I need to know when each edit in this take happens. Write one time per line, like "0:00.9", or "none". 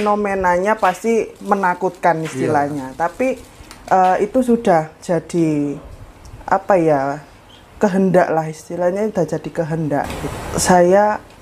0:10.2